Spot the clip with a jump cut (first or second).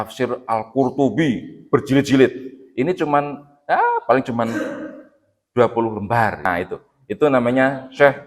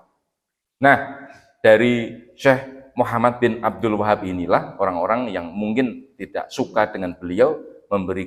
first